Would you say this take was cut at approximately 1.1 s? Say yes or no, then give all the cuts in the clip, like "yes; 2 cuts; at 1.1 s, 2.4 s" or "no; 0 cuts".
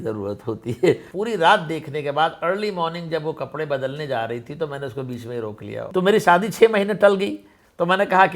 yes; 2 cuts; at 1.1 s, 5.8 s